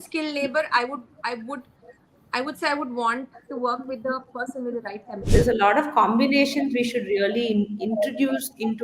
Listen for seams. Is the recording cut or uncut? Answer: cut